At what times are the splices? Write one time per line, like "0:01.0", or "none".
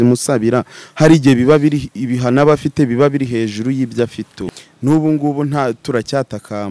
0:04.4